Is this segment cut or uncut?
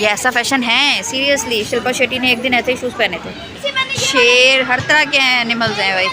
cut